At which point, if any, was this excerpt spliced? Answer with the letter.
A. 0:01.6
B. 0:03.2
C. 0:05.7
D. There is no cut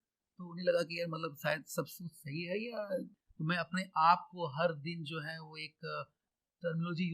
B